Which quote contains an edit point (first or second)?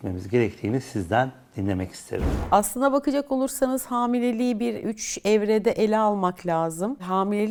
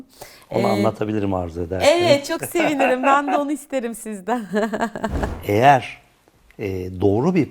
second